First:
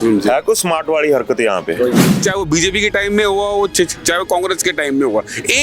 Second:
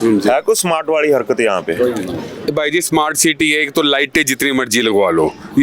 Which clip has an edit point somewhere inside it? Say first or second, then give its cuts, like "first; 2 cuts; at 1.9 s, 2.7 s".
first; 1 cut; at 2.1 s